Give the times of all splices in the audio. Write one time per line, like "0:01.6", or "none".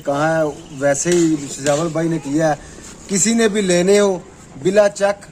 none